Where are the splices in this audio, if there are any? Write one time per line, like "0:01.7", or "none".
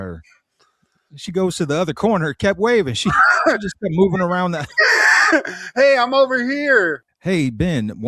0:07.1